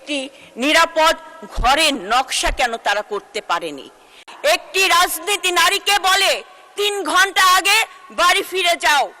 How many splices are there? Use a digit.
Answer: 1